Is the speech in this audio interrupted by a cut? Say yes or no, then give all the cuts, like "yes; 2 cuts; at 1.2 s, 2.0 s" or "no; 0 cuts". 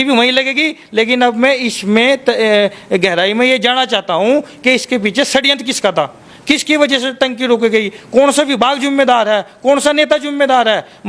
no; 0 cuts